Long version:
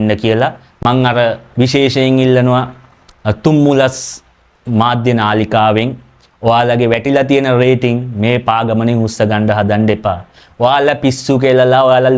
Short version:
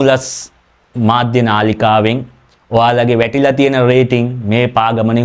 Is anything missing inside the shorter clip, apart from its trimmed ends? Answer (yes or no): no